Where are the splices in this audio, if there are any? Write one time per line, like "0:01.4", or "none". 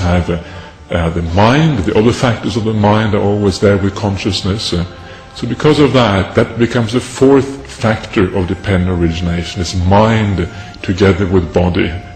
none